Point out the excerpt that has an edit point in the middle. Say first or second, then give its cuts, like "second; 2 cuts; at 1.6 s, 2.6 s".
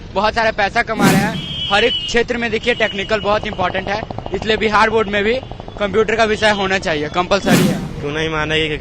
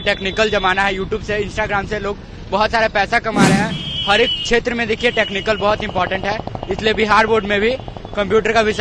first; 1 cut; at 7.9 s